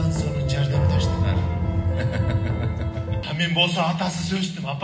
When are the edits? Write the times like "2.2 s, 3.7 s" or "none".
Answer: 3.2 s